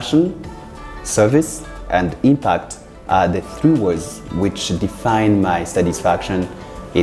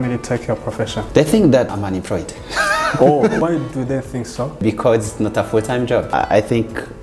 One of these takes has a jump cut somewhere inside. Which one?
second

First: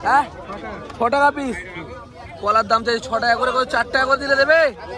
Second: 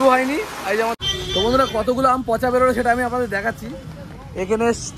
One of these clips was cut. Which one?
second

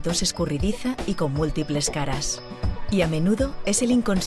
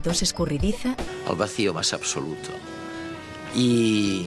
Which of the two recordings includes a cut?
first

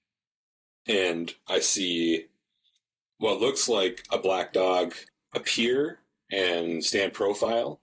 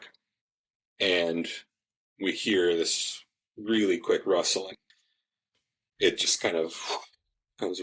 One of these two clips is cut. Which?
first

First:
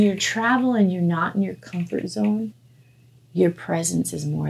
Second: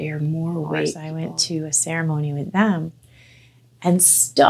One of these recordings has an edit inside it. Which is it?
second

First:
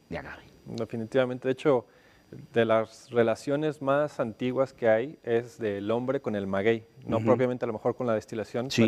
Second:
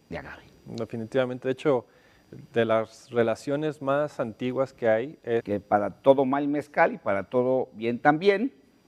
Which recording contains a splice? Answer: first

